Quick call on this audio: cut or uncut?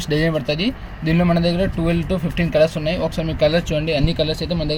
uncut